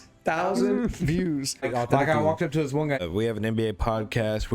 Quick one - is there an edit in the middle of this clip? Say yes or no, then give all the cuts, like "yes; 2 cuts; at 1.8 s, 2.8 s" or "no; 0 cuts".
yes; 2 cuts; at 1.6 s, 3.0 s